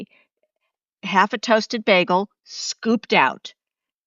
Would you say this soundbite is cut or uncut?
cut